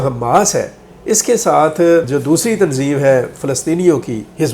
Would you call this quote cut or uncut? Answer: cut